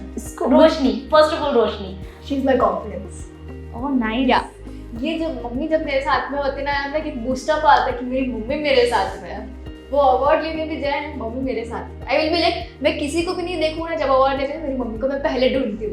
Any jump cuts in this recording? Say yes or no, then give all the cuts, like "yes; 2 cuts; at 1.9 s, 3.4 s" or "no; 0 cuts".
no; 0 cuts